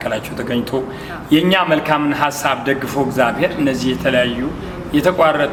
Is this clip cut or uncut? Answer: uncut